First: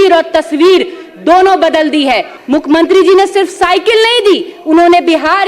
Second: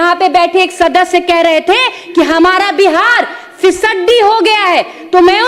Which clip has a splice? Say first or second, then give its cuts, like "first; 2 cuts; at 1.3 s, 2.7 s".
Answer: first; 1 cut; at 2.3 s